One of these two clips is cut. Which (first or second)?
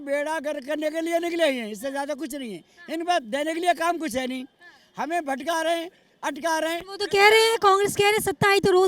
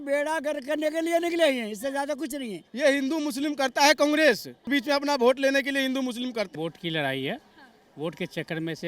second